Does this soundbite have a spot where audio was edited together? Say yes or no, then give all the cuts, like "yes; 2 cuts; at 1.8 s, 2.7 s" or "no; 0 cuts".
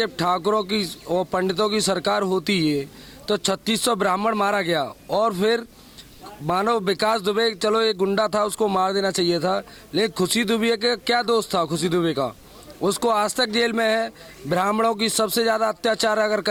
no; 0 cuts